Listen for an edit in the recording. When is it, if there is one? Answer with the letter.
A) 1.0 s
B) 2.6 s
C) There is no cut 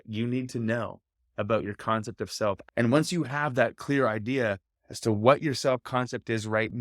B